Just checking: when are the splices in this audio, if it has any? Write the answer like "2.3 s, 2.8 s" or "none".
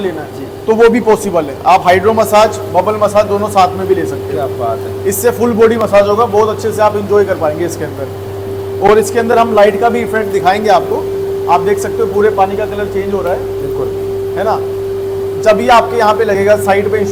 none